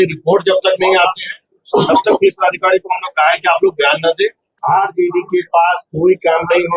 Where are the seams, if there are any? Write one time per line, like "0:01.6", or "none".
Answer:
0:04.5